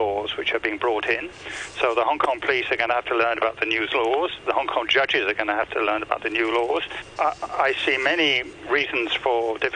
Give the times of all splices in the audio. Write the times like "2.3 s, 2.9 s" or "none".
7.1 s, 8.5 s